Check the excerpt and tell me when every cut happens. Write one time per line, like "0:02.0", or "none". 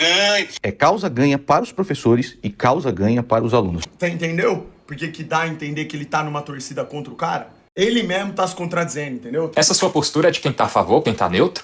0:03.8
0:07.6
0:09.5

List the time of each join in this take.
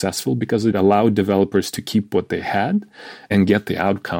0:00.7
0:03.3

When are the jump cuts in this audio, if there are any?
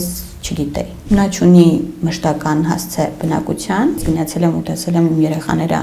0:01.0
0:04.0

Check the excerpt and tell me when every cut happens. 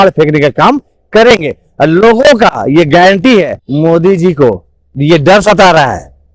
0:03.6

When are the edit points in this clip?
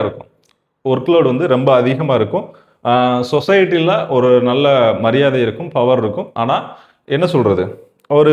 none

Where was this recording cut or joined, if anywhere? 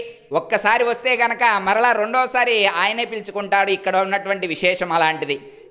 none

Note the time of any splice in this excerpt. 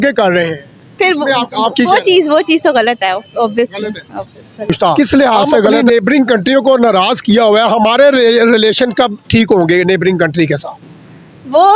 0:05.8

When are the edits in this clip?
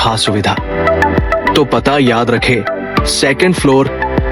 0:01.5

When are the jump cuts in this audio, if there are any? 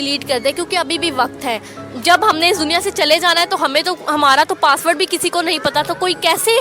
none

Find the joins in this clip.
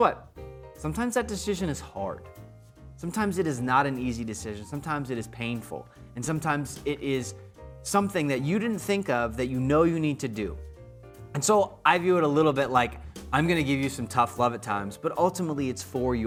none

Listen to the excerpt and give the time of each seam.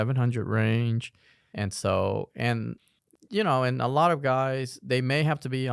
none

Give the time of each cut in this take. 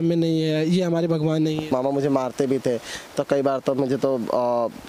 0:01.7

